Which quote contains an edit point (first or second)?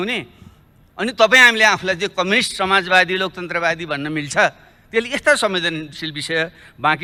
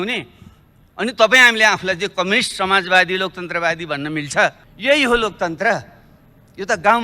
second